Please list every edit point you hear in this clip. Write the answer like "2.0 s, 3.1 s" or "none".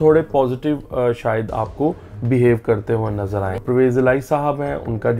3.6 s